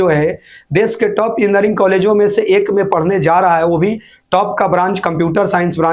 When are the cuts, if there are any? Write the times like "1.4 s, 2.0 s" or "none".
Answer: none